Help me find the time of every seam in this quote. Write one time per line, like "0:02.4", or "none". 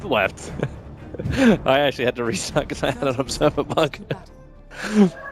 0:00.9